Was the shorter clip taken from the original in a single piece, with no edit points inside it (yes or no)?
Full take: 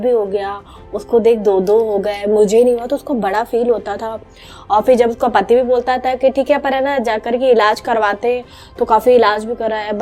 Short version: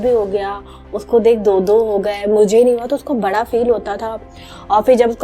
yes